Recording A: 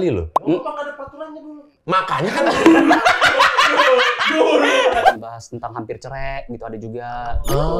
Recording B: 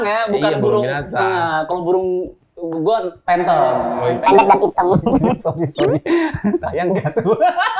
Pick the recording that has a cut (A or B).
A